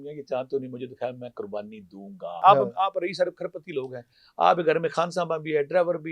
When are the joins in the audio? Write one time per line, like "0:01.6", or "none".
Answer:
0:02.4